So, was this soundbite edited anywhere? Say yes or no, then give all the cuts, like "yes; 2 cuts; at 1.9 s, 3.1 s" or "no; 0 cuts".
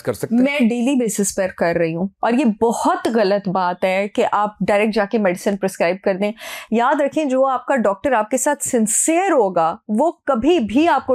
no; 0 cuts